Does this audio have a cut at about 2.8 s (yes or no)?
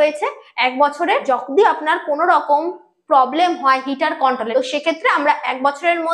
no